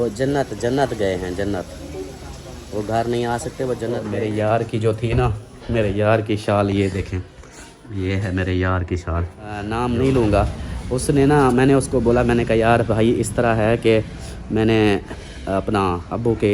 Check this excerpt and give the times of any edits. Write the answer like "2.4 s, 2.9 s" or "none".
4.1 s, 9.6 s

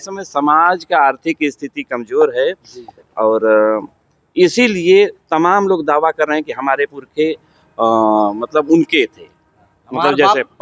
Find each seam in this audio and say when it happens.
none

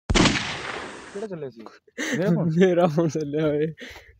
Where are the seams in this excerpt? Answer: 1.0 s

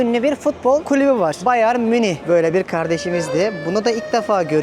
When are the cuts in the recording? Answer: 1.1 s, 2.2 s

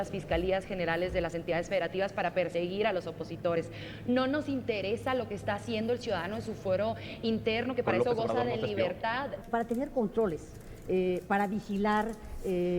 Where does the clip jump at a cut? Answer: 9.4 s

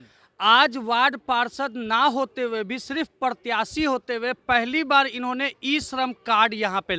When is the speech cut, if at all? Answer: none

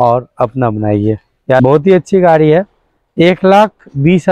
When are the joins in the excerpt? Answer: 1.6 s

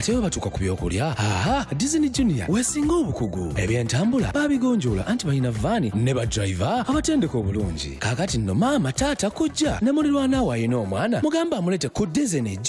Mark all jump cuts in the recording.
none

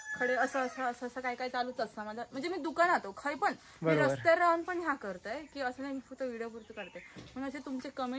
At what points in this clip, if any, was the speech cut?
none

